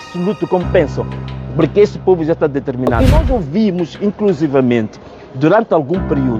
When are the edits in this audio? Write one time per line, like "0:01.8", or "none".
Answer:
0:02.9